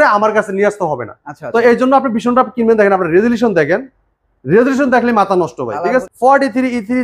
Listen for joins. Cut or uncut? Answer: cut